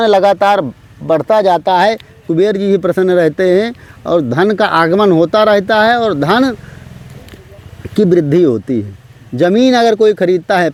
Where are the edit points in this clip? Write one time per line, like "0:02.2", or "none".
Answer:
none